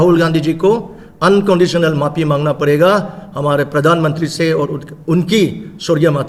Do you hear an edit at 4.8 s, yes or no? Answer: no